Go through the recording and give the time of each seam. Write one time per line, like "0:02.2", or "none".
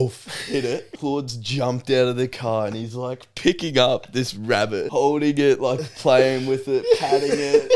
0:00.9
0:04.9